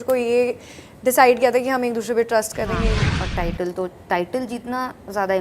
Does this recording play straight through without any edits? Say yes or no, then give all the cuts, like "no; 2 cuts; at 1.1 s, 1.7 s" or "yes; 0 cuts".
no; 1 cut; at 3.0 s